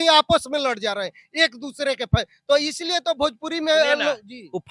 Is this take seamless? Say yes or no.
yes